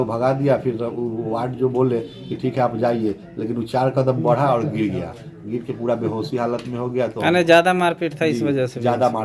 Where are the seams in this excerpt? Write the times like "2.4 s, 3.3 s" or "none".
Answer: none